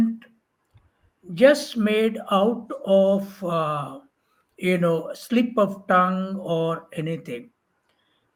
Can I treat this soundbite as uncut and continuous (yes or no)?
yes